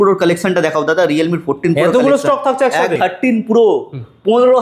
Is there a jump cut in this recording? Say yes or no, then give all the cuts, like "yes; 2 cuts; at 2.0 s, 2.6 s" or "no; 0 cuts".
yes; 1 cut; at 2.9 s